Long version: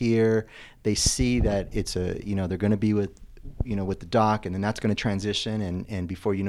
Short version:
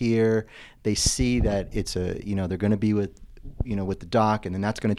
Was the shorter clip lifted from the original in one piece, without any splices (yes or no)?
yes